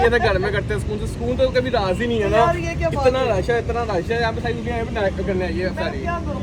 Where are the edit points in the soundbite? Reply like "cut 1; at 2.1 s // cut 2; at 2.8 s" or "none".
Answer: none